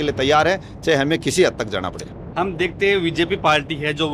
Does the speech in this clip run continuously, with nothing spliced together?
yes; 0 cuts

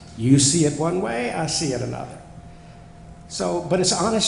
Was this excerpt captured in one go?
yes; 0 cuts

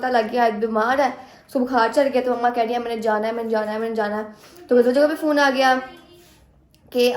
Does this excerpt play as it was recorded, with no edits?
yes; 0 cuts

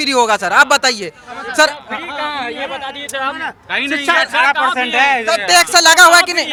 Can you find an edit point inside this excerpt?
no; 0 cuts

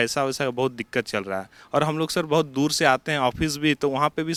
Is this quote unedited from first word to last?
yes; 0 cuts

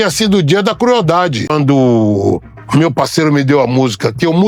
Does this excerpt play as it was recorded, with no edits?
no; 1 cut; at 1.5 s

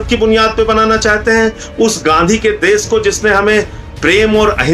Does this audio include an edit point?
no; 0 cuts

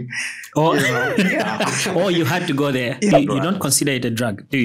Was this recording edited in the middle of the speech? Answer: yes; 1 cut; at 3.1 s

